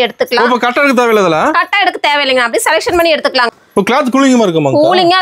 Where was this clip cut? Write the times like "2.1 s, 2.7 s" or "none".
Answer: 3.5 s

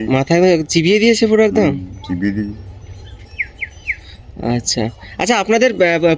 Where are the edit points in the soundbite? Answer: none

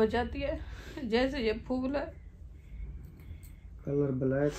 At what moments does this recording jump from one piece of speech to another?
none

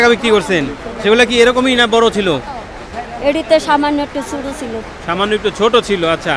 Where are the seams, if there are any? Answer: none

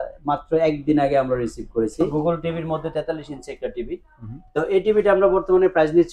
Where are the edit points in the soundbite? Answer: 2.1 s

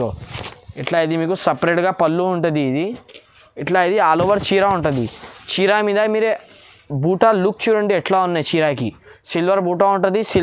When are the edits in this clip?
none

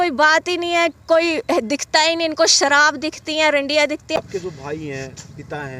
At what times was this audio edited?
none

